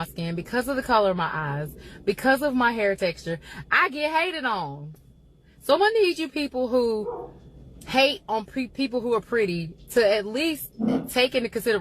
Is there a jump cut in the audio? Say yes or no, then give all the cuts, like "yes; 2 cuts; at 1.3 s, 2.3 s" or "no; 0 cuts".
no; 0 cuts